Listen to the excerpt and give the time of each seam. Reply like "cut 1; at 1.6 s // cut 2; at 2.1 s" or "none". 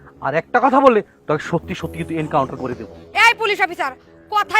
cut 1; at 2.9 s

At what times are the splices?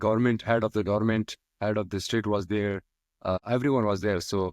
cut 1; at 3.4 s

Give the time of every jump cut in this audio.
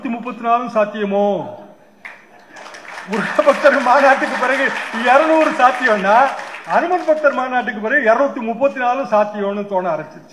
none

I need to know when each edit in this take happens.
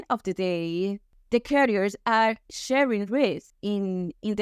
cut 1; at 1.1 s // cut 2; at 3.5 s

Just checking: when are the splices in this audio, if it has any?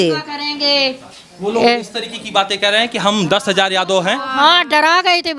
none

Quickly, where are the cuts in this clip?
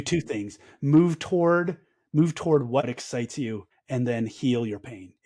cut 1; at 2.8 s

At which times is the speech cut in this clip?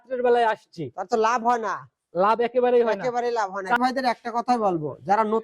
cut 1; at 3.8 s

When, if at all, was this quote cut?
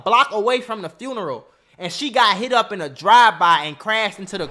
none

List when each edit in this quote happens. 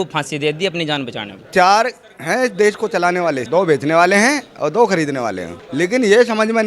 cut 1; at 1.4 s // cut 2; at 3.4 s // cut 3; at 5.6 s

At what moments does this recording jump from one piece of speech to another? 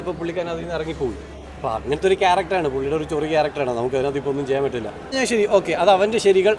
cut 1; at 5.2 s

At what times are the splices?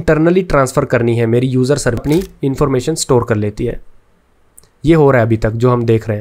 cut 1; at 2.0 s

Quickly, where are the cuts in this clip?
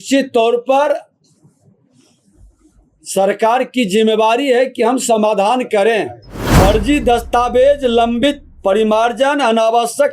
cut 1; at 6.5 s

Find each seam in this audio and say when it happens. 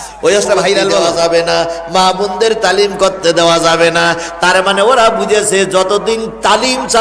cut 1; at 1.1 s

